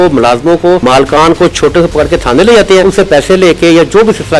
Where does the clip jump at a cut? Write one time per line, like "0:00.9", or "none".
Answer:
0:00.8
0:02.8